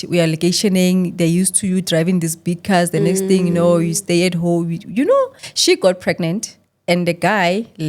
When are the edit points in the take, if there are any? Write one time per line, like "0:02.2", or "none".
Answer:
0:05.4